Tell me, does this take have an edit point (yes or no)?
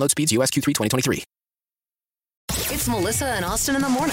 yes